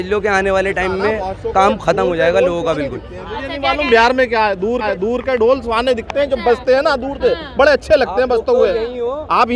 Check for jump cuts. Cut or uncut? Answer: uncut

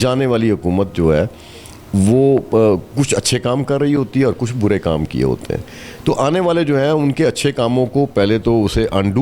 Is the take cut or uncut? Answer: uncut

